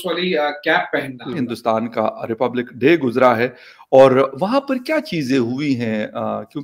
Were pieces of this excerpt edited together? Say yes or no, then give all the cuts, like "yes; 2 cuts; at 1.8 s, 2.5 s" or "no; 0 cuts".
yes; 1 cut; at 1.5 s